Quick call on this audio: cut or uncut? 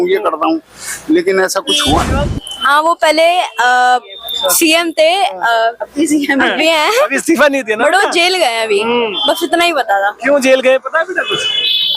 cut